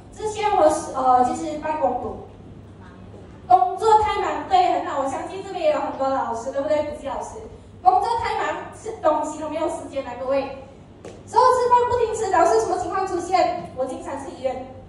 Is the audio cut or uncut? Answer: uncut